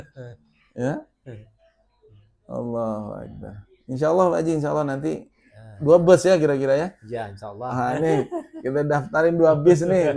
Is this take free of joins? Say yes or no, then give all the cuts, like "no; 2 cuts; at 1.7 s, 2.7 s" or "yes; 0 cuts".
yes; 0 cuts